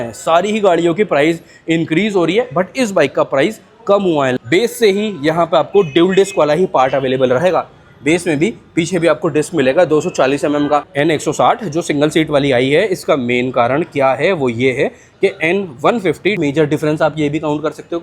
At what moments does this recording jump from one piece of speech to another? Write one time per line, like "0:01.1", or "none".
0:04.3
0:10.9
0:16.4